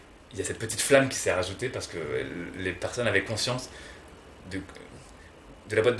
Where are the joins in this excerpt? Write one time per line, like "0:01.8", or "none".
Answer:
none